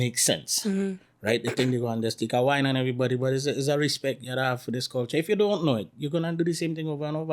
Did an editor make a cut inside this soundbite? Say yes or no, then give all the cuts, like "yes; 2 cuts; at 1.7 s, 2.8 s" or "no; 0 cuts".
no; 0 cuts